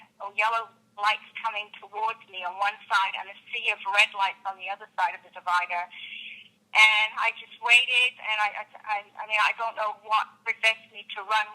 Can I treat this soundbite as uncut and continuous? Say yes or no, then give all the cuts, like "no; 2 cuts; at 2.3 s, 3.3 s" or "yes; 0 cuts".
yes; 0 cuts